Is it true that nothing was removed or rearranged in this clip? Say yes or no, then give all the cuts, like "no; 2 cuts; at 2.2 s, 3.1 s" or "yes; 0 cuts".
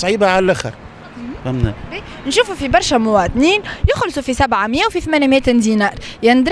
yes; 0 cuts